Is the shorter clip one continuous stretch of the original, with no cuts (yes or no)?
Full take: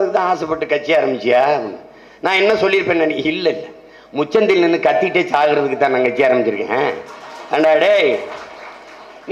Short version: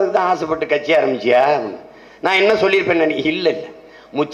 yes